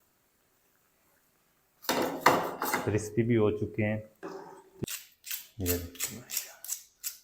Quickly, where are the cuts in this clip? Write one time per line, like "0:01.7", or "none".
0:04.8